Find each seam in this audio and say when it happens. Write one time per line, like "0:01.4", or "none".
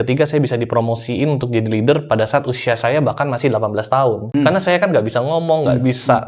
0:04.2